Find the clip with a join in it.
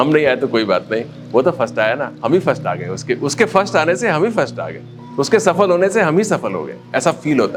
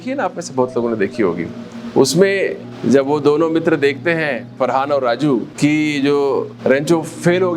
second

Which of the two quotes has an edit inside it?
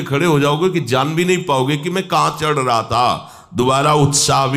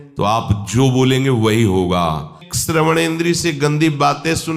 second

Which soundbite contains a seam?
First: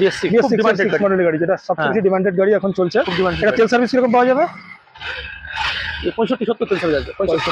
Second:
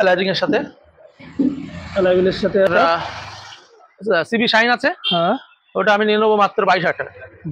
second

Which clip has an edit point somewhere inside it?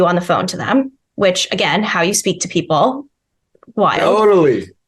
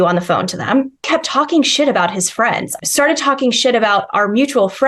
second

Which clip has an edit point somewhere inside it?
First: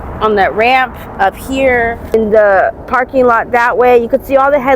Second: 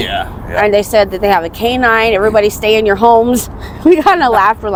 first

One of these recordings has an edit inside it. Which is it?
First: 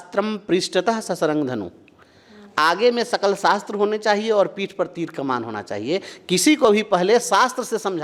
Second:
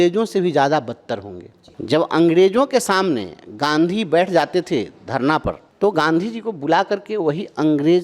second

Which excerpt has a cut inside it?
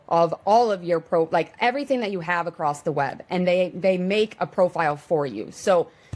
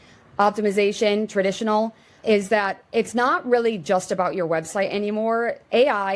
second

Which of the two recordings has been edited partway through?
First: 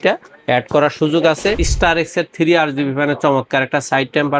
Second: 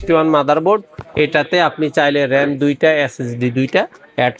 first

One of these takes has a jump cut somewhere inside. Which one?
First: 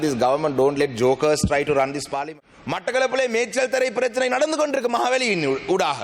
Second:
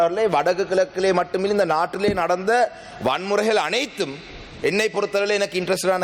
first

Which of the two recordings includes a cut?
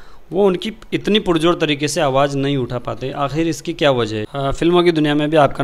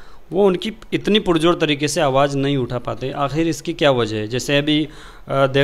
first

